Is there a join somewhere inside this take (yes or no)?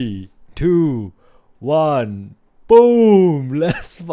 no